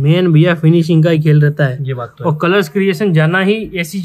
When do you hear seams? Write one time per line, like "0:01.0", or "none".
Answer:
none